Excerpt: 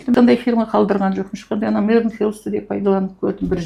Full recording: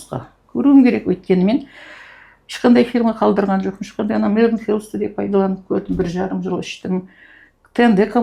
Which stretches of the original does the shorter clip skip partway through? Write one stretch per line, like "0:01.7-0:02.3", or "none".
none